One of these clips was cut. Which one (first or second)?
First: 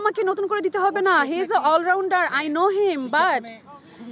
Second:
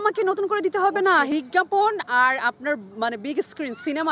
second